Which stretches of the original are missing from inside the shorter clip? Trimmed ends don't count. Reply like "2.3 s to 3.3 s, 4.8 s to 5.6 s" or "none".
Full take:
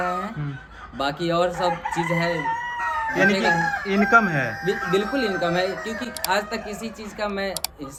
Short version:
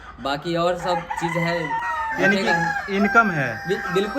2.6 s to 2.8 s

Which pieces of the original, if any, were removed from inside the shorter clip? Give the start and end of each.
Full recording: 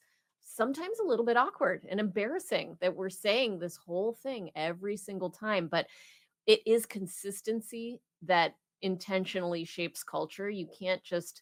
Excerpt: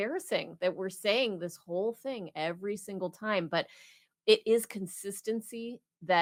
none

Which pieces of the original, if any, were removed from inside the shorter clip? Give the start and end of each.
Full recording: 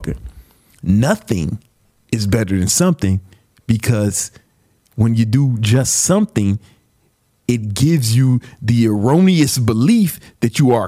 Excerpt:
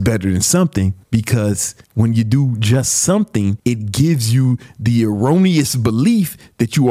3.3 s to 3.6 s, 4.3 s to 4.8 s, 6.6 s to 7.4 s

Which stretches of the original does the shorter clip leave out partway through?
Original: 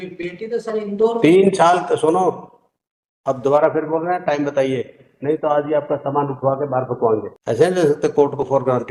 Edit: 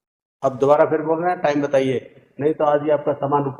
none

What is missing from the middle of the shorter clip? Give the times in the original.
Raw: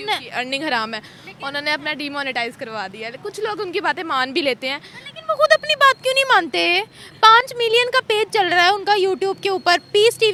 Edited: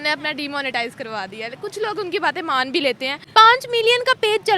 4.8 s to 7.0 s

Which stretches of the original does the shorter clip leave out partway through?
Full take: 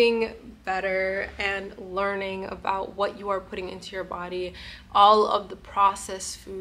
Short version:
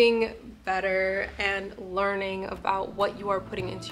none

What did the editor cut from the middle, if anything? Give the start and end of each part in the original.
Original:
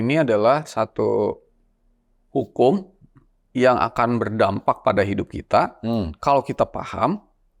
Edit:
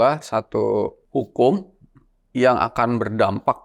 1.4 s to 2.2 s

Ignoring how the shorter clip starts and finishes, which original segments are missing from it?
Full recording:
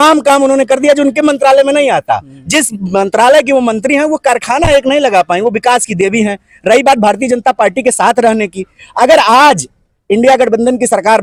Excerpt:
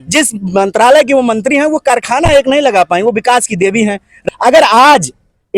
6.5 s to 8.7 s

